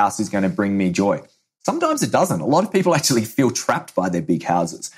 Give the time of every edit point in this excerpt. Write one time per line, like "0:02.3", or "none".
none